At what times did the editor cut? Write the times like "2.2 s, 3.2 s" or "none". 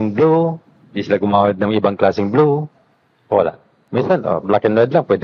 none